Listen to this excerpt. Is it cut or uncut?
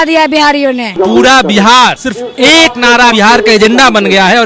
cut